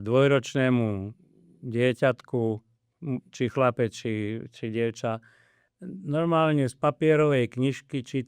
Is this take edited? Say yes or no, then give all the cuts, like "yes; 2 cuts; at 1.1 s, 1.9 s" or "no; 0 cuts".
no; 0 cuts